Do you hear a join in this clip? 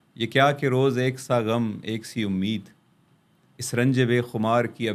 no; 0 cuts

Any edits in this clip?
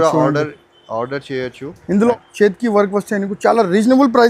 yes; 1 cut; at 2.3 s

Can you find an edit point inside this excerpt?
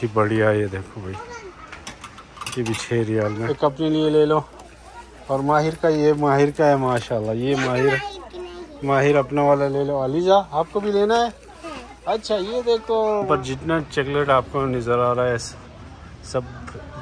yes; 2 cuts; at 3.4 s, 13.2 s

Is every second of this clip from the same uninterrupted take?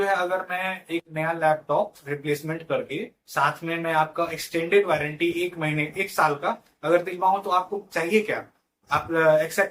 yes; 0 cuts

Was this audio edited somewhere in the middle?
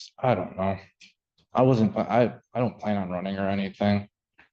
no; 0 cuts

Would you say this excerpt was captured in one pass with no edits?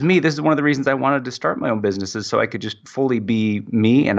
yes; 0 cuts

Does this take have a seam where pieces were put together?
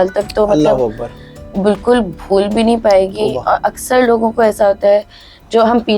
no; 0 cuts

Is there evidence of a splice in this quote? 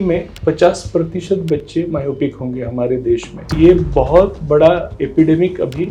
yes; 1 cut; at 3.5 s

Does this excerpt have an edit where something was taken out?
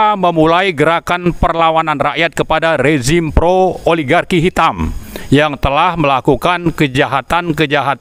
no; 0 cuts

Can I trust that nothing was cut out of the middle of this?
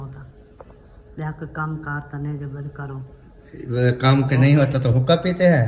yes; 0 cuts

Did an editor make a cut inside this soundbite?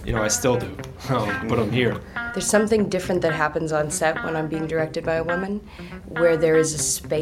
yes; 1 cut; at 2.1 s

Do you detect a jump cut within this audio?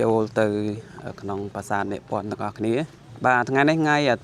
no; 0 cuts

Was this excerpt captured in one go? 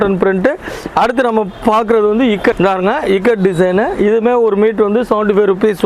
no; 1 cut; at 2.6 s

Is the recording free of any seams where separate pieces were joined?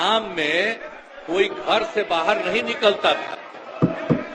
yes; 0 cuts

